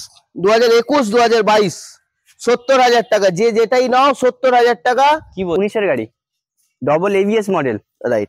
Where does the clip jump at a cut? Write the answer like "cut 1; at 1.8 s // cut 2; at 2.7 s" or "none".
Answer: cut 1; at 5.6 s